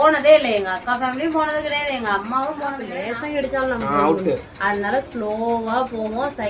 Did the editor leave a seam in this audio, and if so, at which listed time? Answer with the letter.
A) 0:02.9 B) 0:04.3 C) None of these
A